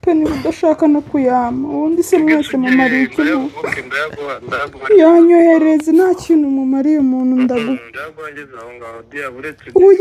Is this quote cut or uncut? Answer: uncut